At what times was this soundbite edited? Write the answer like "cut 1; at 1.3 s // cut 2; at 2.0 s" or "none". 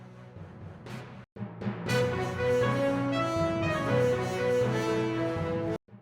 cut 1; at 1.1 s